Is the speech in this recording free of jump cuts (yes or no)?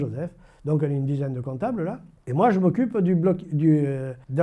yes